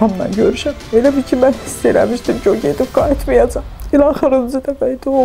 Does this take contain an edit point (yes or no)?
yes